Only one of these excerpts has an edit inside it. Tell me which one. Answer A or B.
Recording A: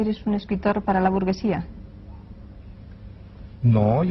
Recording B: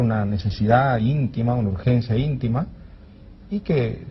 B